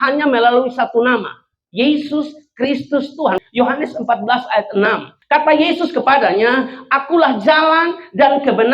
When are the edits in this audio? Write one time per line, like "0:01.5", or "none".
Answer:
0:03.4
0:05.1